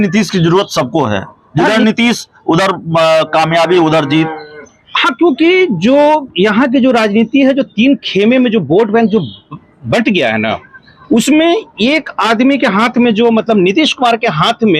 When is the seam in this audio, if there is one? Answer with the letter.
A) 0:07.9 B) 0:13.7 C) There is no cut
C